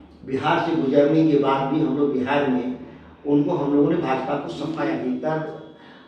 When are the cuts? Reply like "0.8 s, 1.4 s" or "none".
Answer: 4.7 s